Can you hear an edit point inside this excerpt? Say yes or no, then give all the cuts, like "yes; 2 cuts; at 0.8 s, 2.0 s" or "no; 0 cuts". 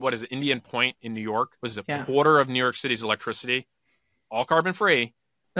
yes; 1 cut; at 1.6 s